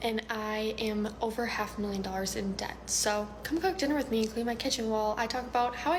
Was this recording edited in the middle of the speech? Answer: no; 0 cuts

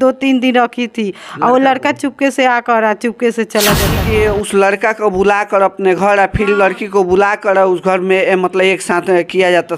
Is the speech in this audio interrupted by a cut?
yes; 1 cut; at 4.0 s

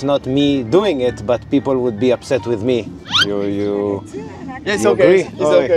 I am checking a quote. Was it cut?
yes; 1 cut; at 3.0 s

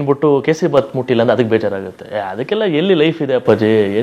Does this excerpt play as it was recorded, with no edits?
yes; 0 cuts

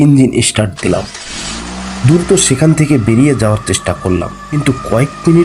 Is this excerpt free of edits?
no; 1 cut; at 4.4 s

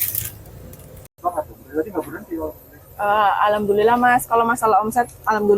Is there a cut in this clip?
yes; 1 cut; at 1.1 s

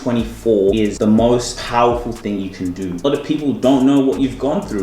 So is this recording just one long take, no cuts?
no; 3 cuts; at 0.9 s, 1.6 s, 3.0 s

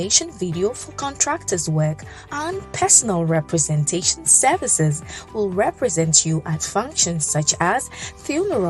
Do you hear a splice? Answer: no; 0 cuts

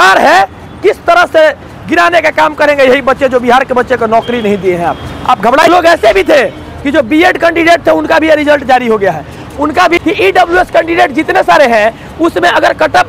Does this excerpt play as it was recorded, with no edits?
no; 2 cuts; at 5.7 s, 10.0 s

